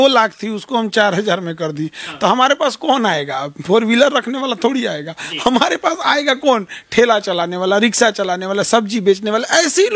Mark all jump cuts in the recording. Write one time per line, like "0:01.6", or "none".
none